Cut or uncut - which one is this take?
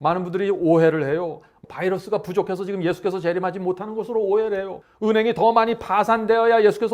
cut